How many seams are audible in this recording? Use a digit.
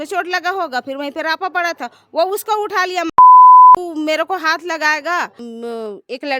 3